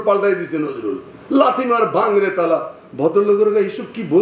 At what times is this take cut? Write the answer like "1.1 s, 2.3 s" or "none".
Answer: none